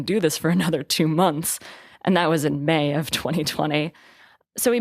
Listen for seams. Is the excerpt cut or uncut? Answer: uncut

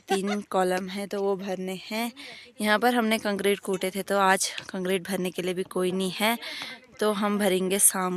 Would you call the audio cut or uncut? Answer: uncut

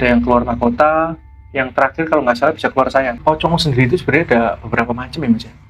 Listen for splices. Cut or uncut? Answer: cut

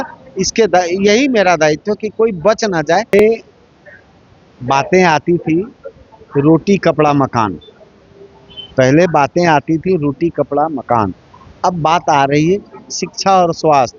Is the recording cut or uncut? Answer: cut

